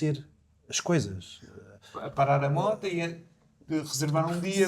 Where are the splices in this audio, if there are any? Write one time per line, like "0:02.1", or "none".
none

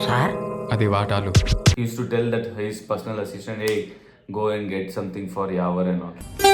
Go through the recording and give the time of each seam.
0:01.7

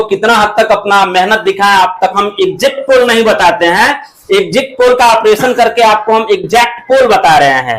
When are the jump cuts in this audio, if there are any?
0:02.2

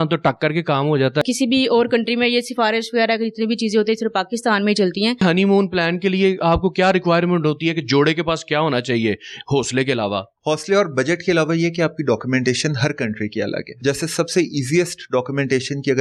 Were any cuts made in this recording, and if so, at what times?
0:01.2
0:05.2
0:10.3
0:13.7

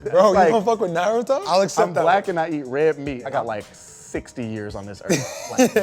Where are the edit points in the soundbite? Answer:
0:01.4
0:03.3

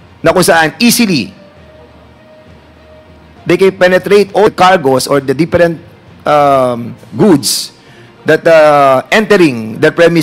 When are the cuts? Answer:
0:04.5
0:07.0

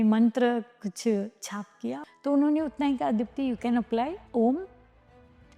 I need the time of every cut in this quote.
0:02.0
0:04.2

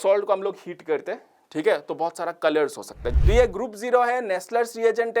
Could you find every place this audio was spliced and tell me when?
0:03.0

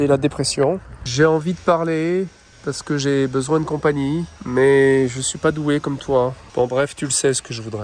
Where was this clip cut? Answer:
0:01.0
0:02.5
0:04.4
0:06.4

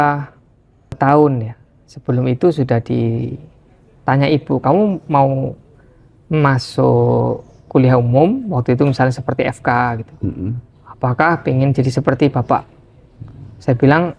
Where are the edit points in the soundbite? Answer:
0:00.9

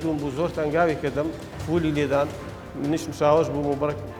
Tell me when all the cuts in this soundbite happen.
none

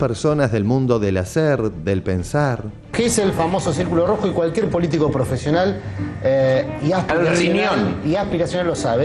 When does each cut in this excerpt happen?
0:02.7

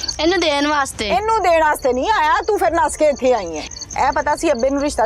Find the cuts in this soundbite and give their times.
0:03.6

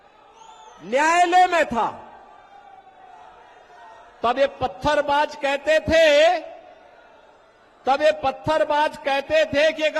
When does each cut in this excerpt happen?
none

